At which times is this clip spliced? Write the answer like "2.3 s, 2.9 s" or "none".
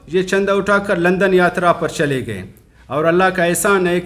none